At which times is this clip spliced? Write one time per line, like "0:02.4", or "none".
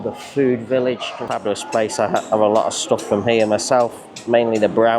0:01.3

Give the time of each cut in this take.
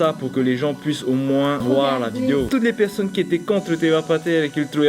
0:01.6
0:02.5

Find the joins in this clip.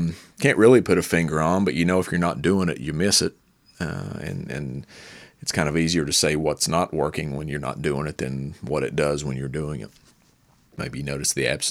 0:10.8

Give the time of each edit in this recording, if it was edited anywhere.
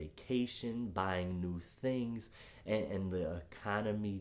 none

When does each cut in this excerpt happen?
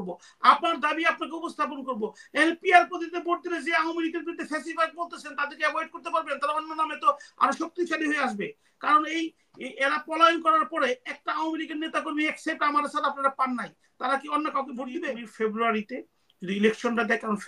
0:15.2

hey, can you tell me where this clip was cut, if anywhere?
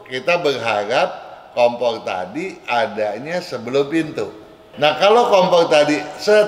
0:04.7

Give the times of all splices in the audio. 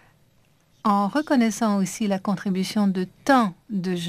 none

